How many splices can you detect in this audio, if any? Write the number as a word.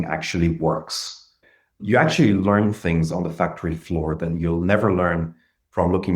one